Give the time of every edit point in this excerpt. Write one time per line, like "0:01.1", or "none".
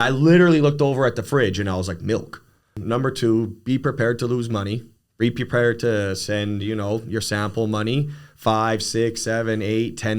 0:02.8